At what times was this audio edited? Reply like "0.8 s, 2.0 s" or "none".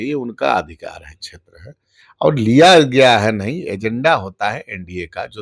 none